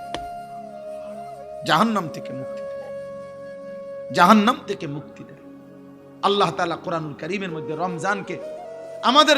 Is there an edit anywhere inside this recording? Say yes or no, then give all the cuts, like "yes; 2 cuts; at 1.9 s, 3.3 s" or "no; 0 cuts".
yes; 2 cuts; at 2.6 s, 4.1 s